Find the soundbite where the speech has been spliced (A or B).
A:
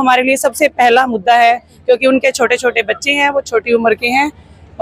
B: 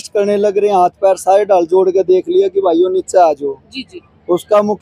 A